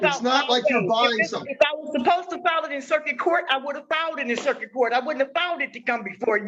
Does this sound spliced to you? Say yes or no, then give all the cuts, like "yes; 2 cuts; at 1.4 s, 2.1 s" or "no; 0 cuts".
no; 0 cuts